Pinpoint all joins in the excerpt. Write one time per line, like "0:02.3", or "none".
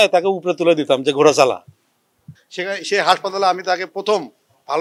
0:02.3